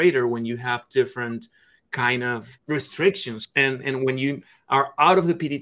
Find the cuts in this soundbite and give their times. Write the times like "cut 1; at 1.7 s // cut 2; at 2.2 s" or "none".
cut 1; at 2.5 s // cut 2; at 3.4 s